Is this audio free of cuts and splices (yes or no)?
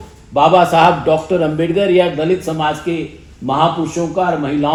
yes